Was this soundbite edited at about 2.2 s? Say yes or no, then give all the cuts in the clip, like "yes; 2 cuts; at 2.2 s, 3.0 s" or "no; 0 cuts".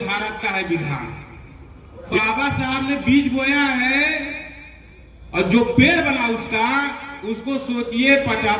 yes; 1 cut; at 2.2 s